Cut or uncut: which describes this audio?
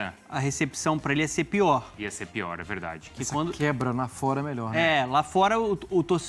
uncut